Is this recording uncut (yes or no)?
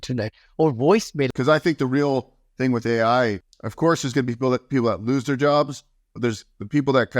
no